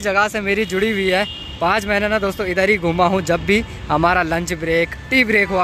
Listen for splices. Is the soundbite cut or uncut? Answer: uncut